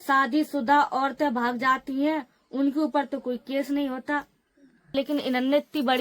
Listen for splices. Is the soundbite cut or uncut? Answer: cut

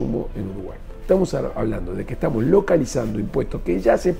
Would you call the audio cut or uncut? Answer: uncut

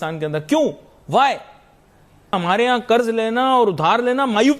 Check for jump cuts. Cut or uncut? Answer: cut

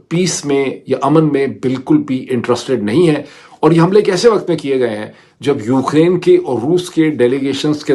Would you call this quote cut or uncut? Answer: uncut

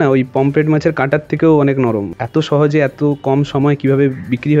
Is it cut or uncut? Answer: cut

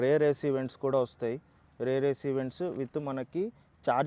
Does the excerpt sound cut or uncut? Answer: uncut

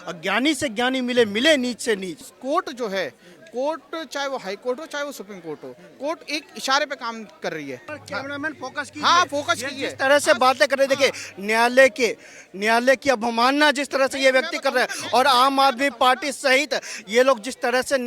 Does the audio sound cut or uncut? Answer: cut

